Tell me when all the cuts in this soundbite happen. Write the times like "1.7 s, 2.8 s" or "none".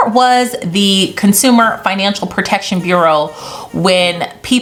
none